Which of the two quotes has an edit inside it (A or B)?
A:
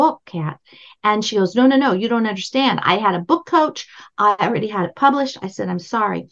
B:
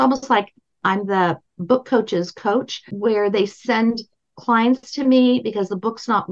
B